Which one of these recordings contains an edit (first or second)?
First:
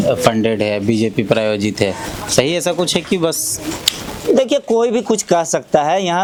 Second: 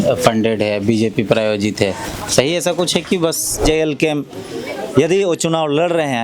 second